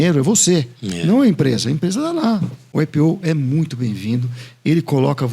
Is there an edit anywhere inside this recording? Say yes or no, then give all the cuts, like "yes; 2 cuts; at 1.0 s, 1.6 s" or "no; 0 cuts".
yes; 1 cut; at 2.6 s